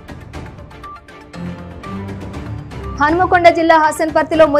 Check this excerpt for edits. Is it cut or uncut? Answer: cut